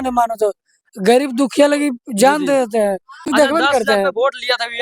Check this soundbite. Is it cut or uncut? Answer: cut